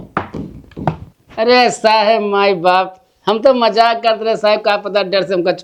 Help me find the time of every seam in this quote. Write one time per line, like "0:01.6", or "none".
none

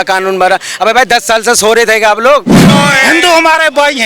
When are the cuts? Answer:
0:02.6

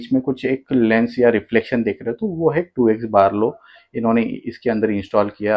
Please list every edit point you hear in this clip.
none

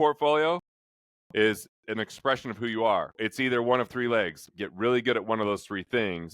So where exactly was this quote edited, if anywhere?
0:03.1
0:04.5

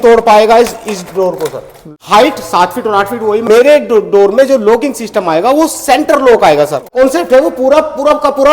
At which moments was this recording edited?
0:01.9
0:03.5
0:06.9

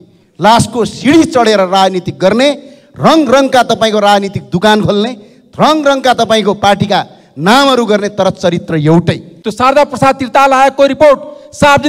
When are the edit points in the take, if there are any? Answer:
0:09.4

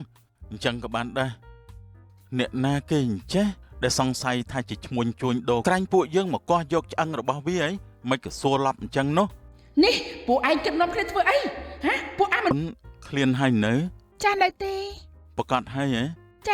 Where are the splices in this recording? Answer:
0:05.6
0:12.5

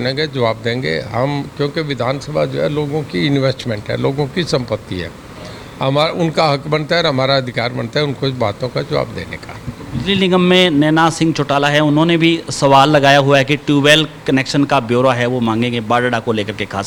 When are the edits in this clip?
none

